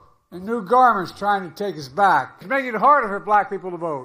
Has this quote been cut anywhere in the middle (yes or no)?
yes